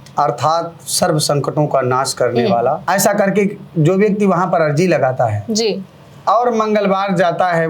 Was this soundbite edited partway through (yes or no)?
yes